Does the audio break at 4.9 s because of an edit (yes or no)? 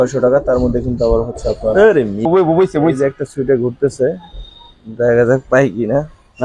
no